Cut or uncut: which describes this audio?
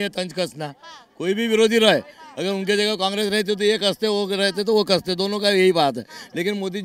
uncut